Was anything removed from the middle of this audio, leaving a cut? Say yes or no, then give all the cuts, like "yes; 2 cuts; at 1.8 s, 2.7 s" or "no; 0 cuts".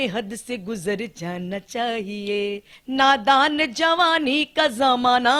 yes; 1 cut; at 2.8 s